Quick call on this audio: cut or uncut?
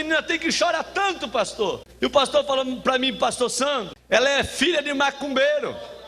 cut